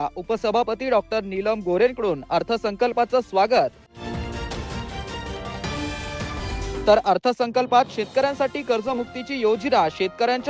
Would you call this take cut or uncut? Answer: uncut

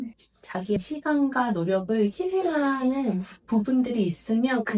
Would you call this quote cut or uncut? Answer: uncut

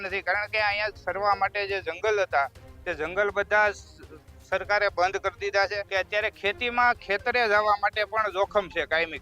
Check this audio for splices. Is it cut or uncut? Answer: cut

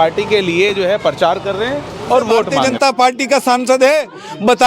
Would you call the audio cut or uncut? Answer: cut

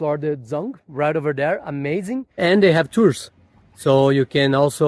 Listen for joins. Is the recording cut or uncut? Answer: cut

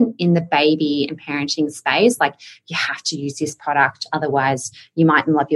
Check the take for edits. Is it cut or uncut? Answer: uncut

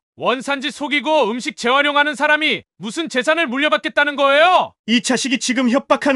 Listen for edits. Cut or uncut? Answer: cut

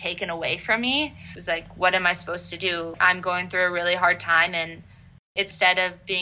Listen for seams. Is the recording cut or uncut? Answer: cut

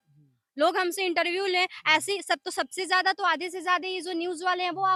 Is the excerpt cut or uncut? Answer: uncut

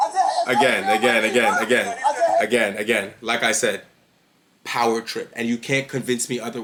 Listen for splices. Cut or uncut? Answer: uncut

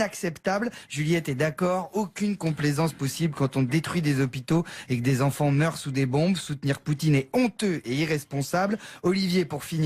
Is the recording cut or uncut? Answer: cut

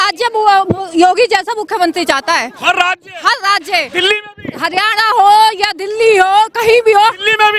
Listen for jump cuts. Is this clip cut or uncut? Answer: uncut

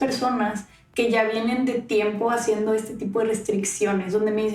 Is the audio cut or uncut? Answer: uncut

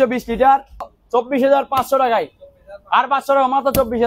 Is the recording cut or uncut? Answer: cut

